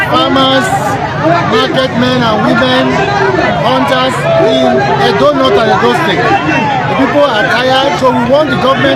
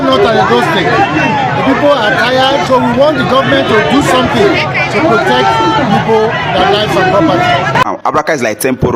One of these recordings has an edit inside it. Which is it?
second; 1 cut; at 7.8 s

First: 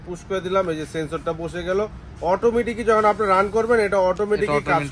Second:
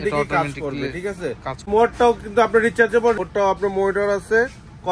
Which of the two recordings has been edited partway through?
second; 2 cuts; at 1.7 s, 3.2 s

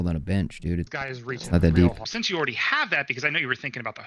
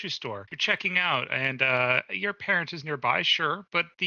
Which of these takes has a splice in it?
first; 2 cuts; at 1.1 s, 2.1 s

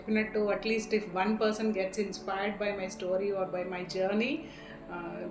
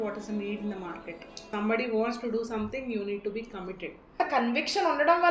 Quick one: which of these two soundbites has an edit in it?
second; 2 cuts; at 1.4 s, 4.2 s

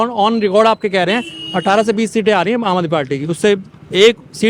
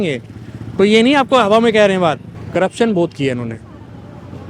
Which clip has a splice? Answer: second; 1 cut; at 2.3 s

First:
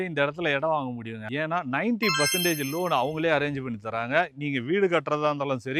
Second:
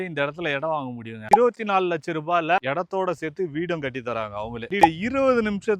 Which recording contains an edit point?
second; 2 cuts; at 1.3 s, 4.8 s

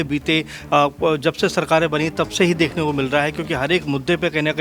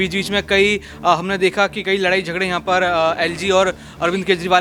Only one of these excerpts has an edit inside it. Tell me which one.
first; 1 cut; at 1.4 s

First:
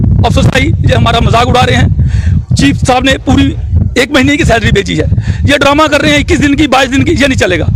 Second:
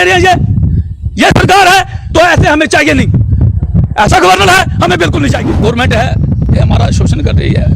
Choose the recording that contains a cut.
second; 1 cut; at 5.4 s

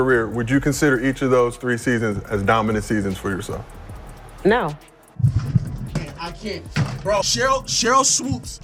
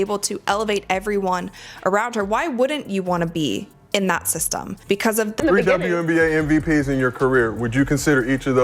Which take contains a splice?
second; 1 cut; at 5.4 s

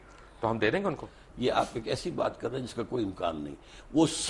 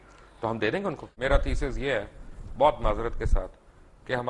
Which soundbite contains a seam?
second; 1 cut; at 1.1 s

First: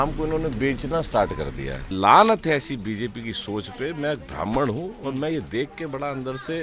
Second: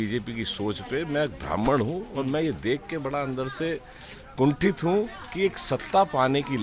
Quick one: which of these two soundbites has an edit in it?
first; 1 cut; at 1.9 s

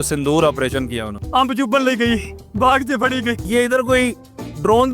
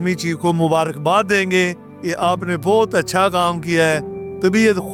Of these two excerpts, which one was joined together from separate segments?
first; 3 cuts; at 1.1 s, 2.4 s, 3.4 s

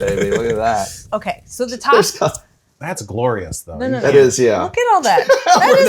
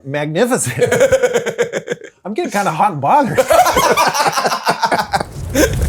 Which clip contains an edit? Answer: first; 1 cut; at 1.0 s

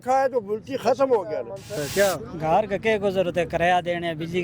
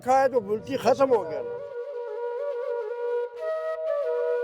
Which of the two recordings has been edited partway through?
first; 1 cut; at 1.7 s

